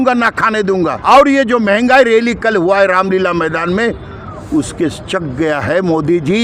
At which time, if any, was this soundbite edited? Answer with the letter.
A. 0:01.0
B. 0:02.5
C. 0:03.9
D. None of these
A